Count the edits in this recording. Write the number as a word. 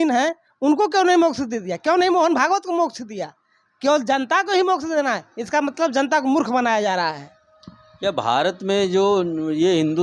zero